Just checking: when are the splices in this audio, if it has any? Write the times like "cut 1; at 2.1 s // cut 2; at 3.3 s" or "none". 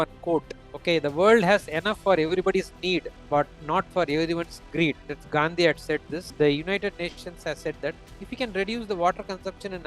cut 1; at 6.3 s